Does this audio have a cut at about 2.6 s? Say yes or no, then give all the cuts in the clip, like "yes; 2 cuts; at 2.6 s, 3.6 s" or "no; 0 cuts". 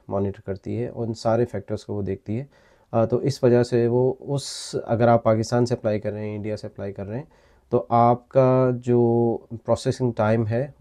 no; 0 cuts